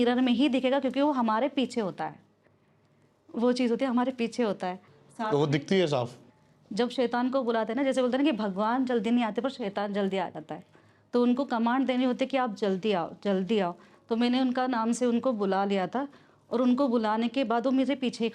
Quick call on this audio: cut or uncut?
cut